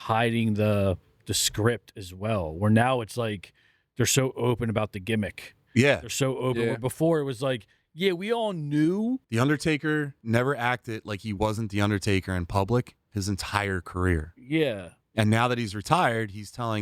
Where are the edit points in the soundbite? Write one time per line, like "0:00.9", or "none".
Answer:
0:09.3